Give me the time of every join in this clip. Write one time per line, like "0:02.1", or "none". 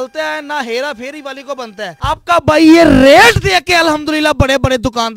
0:01.9